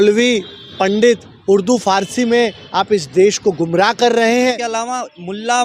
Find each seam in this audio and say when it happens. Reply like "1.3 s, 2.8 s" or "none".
4.6 s